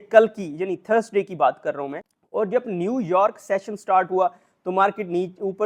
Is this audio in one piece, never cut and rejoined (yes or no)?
yes